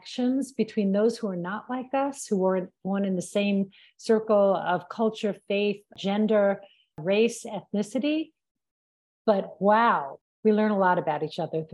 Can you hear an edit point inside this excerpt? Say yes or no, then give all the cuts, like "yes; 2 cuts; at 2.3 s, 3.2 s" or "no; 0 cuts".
yes; 2 cuts; at 7.0 s, 10.2 s